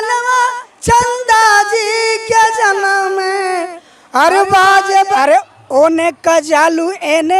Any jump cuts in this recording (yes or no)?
yes